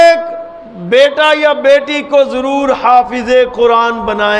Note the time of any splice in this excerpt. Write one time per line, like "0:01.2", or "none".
none